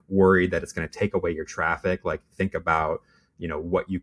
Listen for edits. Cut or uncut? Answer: uncut